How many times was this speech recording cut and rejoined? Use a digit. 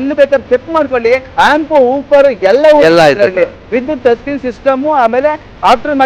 1